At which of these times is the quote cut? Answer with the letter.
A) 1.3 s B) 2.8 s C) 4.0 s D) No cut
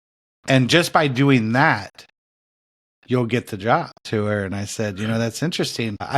C